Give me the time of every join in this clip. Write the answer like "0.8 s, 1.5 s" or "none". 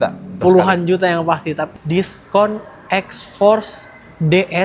1.7 s